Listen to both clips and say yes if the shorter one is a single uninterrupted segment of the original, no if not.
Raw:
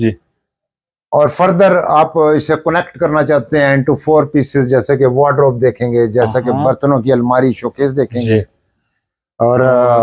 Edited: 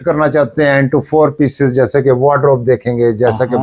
yes